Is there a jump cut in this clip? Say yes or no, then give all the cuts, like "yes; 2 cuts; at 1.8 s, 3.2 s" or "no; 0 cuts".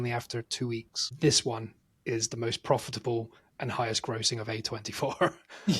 yes; 1 cut; at 1.1 s